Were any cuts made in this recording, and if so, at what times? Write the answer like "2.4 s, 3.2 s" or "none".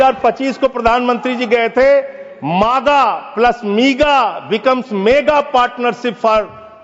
none